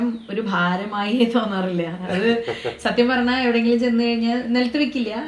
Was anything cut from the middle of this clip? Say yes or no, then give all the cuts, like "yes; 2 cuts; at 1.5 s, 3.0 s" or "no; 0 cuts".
no; 0 cuts